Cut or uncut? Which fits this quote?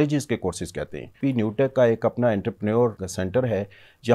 cut